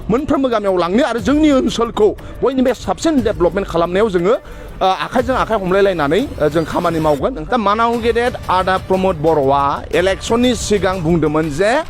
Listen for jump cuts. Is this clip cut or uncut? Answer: cut